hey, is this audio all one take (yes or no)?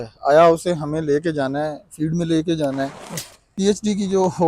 no